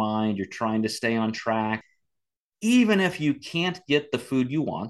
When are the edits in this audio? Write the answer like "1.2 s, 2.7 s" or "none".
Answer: 1.8 s